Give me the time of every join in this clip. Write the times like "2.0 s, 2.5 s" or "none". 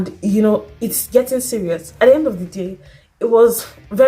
1.9 s